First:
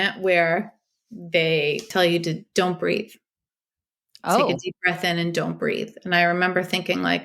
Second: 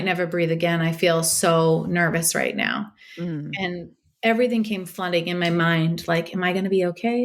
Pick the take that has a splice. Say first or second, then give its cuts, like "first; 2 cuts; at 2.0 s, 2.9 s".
first; 1 cut; at 1.9 s